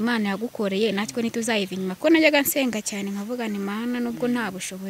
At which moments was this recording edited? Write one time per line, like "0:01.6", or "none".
0:02.0